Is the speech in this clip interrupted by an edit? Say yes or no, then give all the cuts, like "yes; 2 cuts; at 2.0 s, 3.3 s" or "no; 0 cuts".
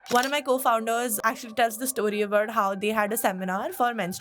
yes; 1 cut; at 1.2 s